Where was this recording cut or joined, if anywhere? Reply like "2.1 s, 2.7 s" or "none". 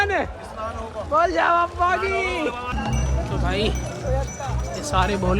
2.7 s